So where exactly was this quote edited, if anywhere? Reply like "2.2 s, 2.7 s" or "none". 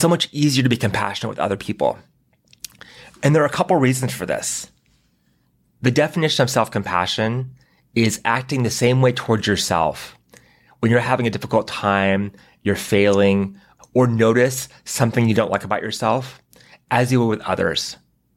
none